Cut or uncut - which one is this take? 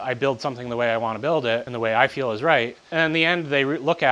cut